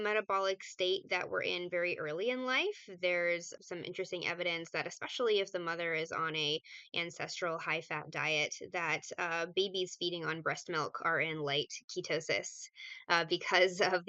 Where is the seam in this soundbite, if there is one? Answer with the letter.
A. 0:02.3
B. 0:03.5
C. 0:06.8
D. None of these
B